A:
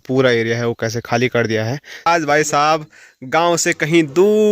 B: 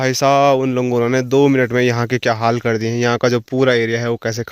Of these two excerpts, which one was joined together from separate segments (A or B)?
A